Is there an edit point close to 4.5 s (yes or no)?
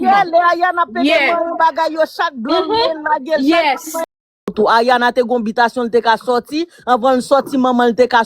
yes